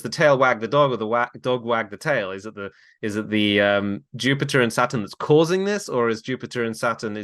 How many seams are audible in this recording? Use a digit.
0